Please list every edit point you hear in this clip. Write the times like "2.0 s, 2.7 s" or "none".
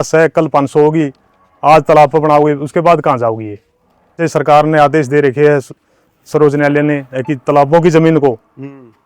4.2 s